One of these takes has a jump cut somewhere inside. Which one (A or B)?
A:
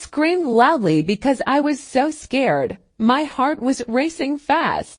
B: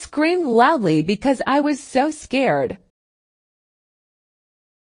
A